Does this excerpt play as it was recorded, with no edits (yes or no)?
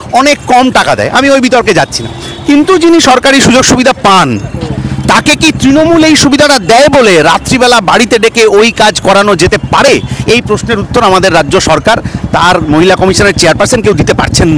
yes